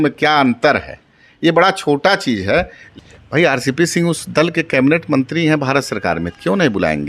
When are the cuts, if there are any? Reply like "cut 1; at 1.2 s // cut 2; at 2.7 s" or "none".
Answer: cut 1; at 2.9 s